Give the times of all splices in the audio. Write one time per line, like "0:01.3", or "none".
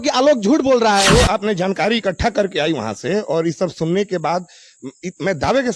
0:01.1